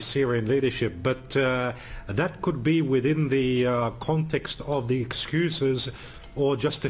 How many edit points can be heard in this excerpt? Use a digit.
1